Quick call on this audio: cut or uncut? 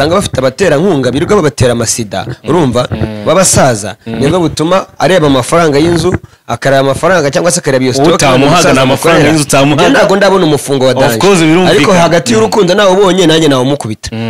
uncut